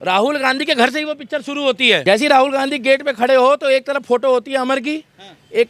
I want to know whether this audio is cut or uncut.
cut